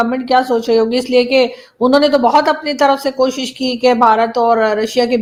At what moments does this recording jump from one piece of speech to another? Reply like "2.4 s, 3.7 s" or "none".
none